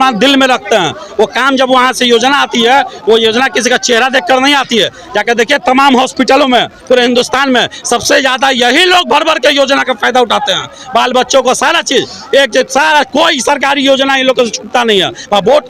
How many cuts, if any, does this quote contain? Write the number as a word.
zero